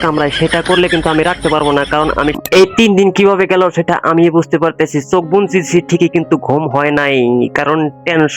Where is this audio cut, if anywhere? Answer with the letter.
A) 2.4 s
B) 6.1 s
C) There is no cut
A